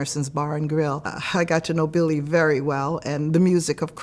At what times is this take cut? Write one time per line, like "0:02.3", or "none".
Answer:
0:01.1